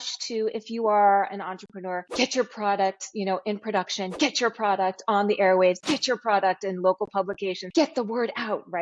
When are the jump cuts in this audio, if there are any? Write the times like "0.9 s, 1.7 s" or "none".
2.0 s, 7.6 s